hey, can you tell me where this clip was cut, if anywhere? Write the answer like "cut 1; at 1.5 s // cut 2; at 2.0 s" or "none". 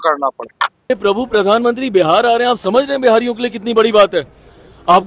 cut 1; at 0.9 s